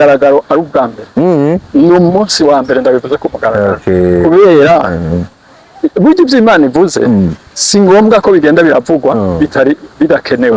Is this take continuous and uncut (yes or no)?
yes